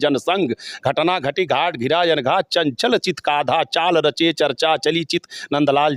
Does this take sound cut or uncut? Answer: uncut